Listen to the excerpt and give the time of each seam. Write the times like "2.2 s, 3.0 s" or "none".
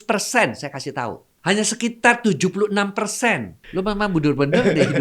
1.3 s, 3.6 s